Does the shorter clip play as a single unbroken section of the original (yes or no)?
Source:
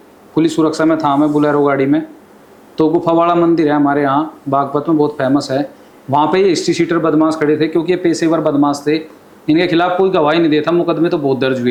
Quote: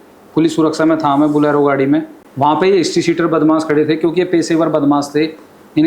no